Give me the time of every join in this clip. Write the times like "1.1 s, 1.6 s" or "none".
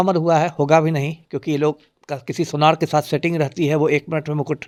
none